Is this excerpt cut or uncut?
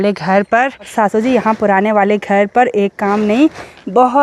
cut